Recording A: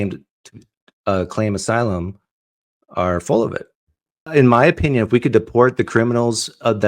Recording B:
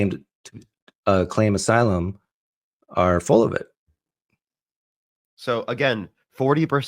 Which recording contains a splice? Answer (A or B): A